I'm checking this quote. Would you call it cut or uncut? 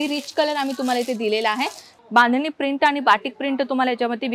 cut